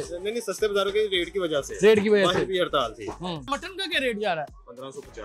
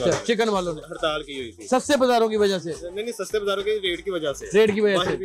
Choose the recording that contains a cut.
first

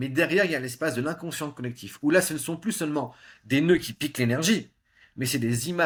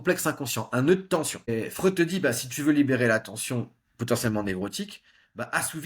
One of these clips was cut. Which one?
second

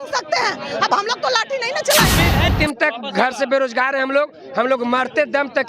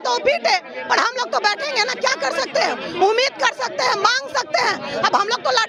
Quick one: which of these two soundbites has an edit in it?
first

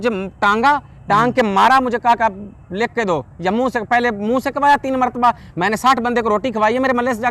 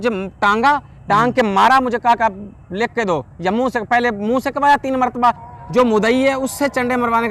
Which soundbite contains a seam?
second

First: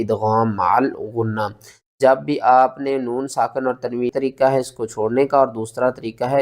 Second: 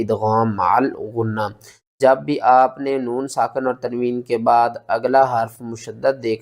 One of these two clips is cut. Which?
first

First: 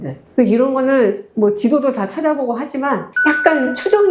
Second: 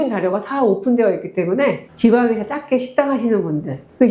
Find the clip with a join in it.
second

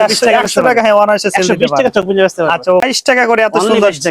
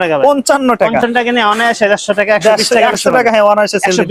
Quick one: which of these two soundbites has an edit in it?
first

